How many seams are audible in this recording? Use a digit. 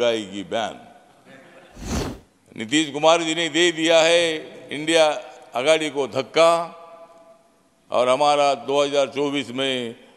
1